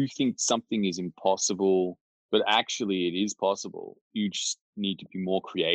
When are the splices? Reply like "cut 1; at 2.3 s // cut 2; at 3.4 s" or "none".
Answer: none